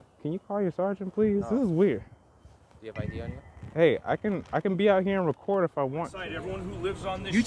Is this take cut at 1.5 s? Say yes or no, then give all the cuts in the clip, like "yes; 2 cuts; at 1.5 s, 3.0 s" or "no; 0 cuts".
no; 1 cut; at 6.2 s